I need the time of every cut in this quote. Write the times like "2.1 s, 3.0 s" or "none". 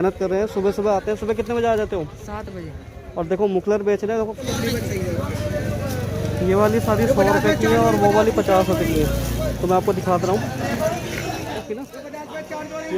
4.4 s, 11.6 s